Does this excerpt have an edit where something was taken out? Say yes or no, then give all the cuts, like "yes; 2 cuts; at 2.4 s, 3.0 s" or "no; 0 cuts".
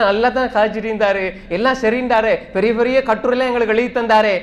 no; 0 cuts